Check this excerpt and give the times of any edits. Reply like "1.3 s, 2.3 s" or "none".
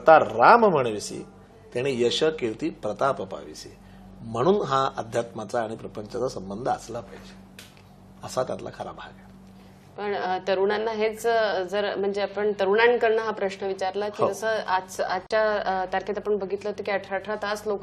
none